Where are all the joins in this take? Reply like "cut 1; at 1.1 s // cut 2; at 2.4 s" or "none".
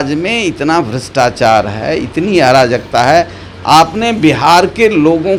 none